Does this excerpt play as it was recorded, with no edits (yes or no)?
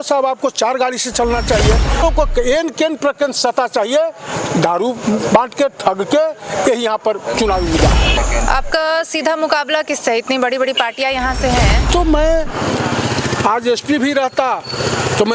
no